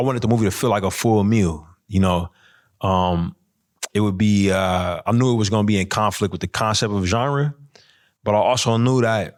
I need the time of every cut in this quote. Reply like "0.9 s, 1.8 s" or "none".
none